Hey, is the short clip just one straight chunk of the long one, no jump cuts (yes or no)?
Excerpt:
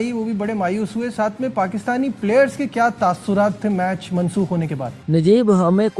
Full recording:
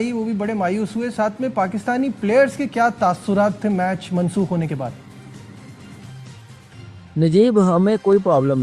no